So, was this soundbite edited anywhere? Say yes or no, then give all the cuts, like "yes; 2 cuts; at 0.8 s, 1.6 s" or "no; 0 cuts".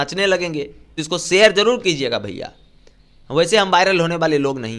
yes; 1 cut; at 0.9 s